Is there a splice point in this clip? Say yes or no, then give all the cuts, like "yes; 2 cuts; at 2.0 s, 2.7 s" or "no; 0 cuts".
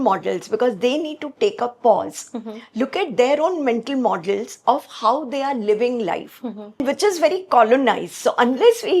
yes; 1 cut; at 6.8 s